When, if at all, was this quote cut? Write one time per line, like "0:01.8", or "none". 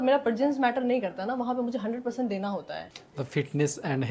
0:03.0